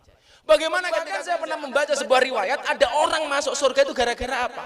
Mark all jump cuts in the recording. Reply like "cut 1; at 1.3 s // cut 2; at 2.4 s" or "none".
cut 1; at 1.1 s